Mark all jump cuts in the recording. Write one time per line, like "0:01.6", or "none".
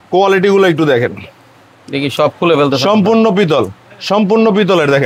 none